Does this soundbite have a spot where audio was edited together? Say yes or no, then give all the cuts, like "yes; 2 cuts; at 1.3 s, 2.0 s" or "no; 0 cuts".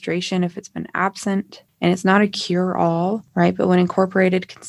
yes; 2 cuts; at 1.6 s, 3.2 s